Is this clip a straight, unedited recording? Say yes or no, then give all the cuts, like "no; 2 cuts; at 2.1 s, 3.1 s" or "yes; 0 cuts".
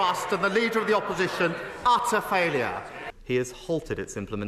no; 1 cut; at 3.0 s